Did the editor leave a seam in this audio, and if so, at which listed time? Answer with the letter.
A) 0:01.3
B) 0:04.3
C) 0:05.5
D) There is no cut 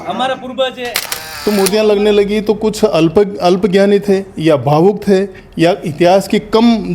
A